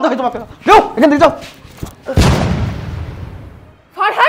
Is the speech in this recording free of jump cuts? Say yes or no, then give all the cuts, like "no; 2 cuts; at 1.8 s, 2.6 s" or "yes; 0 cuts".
yes; 0 cuts